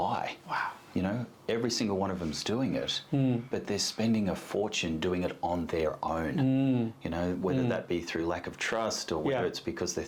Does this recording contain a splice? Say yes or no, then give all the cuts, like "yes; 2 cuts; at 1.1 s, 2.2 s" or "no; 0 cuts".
no; 0 cuts